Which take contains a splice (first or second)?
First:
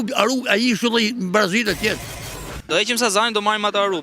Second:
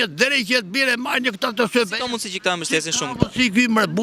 first